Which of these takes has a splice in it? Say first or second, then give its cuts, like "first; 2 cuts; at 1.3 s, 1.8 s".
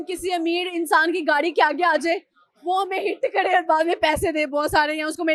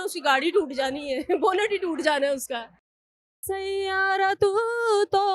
second; 1 cut; at 3.0 s